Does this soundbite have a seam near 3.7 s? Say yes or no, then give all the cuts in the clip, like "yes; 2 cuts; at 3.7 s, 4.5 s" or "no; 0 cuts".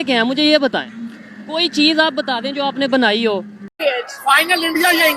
yes; 1 cut; at 3.7 s